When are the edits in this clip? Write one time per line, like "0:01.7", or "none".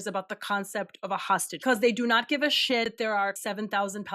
0:01.6
0:03.2